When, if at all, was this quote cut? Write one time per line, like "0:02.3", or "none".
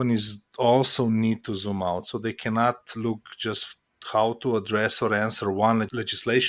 none